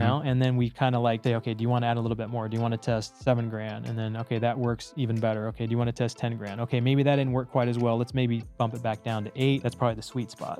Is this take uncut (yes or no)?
no